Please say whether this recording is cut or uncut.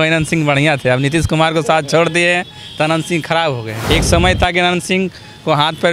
cut